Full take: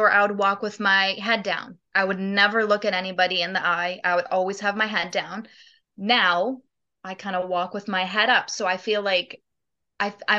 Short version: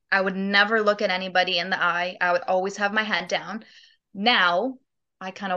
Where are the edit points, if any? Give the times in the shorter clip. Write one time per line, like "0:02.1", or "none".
none